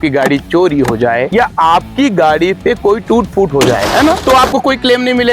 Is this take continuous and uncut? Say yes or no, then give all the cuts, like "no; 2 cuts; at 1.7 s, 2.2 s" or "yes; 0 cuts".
no; 1 cut; at 4.2 s